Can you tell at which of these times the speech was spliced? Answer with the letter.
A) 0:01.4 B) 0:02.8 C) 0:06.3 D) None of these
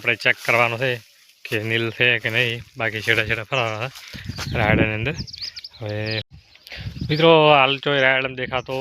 C